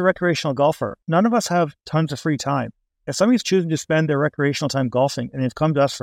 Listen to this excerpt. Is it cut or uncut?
cut